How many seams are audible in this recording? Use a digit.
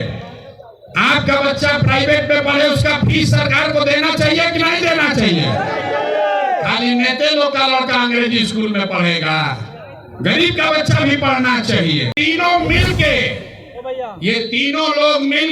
1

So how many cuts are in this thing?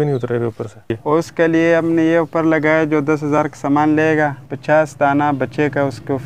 2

